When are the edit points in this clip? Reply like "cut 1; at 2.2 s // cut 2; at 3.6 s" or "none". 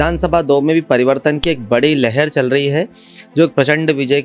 none